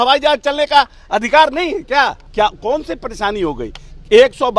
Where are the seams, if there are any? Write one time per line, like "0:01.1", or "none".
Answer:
0:02.2